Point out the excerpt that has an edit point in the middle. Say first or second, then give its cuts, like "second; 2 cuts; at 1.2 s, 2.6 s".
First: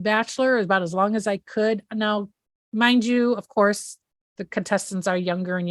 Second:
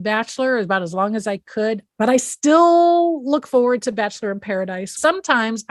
second; 2 cuts; at 1.9 s, 5.0 s